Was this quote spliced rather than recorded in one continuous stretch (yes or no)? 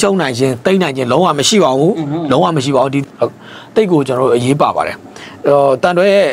no